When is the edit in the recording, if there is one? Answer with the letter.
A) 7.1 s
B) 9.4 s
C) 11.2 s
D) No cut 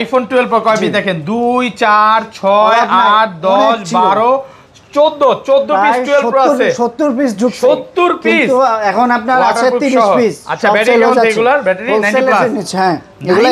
D